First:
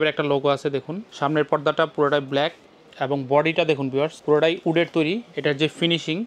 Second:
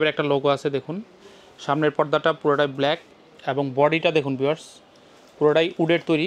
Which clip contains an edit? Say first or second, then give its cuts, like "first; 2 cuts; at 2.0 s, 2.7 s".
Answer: first; 2 cuts; at 1.0 s, 4.2 s